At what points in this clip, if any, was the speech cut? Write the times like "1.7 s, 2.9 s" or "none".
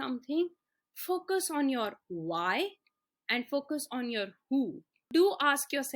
5.1 s